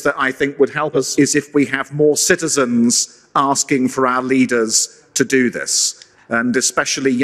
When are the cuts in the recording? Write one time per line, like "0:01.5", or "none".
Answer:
0:00.9